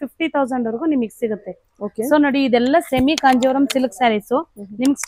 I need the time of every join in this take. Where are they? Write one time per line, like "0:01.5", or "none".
none